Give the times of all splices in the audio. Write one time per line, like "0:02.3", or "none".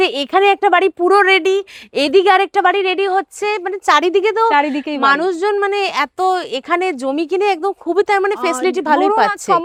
none